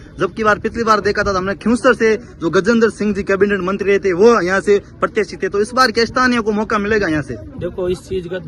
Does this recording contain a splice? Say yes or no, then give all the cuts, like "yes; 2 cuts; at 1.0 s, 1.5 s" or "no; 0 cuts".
no; 0 cuts